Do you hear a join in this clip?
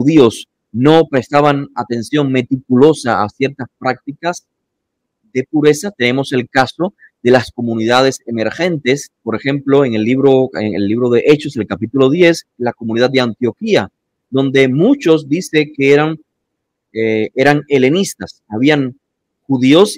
no; 0 cuts

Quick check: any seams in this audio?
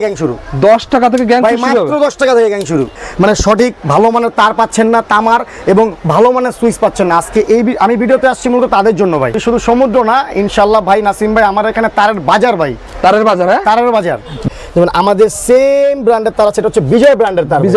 yes; 3 cuts; at 3.0 s, 9.4 s, 14.5 s

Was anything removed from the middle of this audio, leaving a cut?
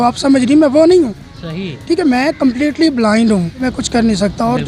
yes; 1 cut; at 3.7 s

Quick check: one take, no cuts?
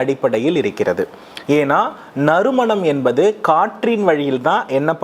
yes; 0 cuts

